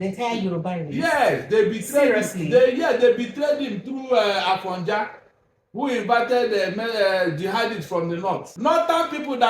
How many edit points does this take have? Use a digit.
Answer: 1